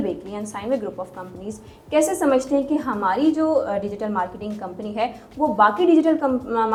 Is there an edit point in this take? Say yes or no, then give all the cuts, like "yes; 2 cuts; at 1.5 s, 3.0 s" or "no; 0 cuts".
no; 0 cuts